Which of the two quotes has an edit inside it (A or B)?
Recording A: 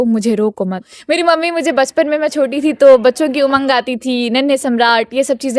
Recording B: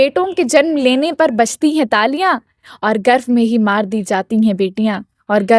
A